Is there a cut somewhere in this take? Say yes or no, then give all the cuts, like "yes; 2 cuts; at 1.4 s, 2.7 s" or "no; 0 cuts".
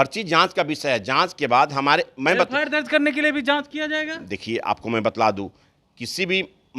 no; 0 cuts